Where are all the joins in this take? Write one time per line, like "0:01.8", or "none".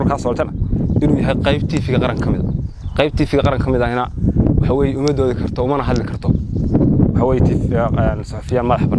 none